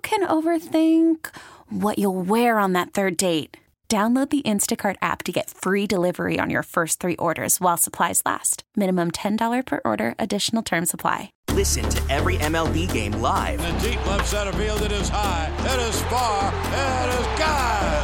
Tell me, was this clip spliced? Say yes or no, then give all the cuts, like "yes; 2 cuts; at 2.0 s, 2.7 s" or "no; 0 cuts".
yes; 1 cut; at 11.4 s